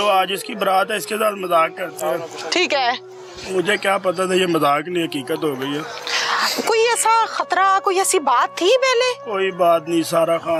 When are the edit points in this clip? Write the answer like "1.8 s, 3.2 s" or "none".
none